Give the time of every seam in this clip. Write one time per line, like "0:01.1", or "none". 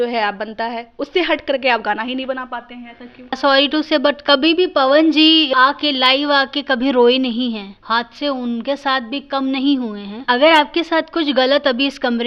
0:03.4
0:07.7
0:10.1